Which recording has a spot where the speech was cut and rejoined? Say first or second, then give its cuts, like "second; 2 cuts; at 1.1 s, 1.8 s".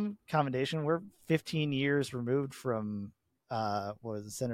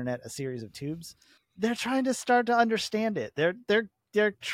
second; 1 cut; at 1.4 s